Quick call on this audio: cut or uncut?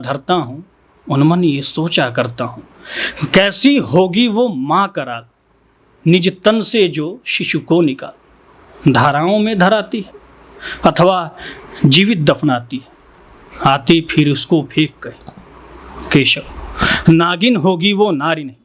uncut